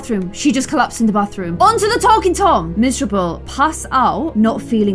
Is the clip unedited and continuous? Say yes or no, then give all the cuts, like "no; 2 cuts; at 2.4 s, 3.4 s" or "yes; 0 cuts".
yes; 0 cuts